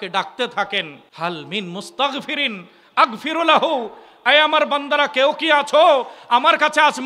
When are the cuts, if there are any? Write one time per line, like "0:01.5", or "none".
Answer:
0:01.0